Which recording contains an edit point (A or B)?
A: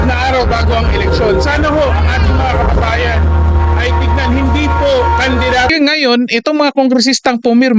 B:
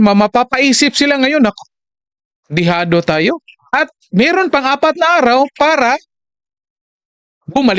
A